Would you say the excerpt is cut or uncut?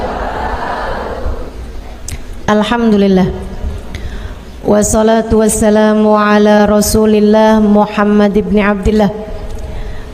uncut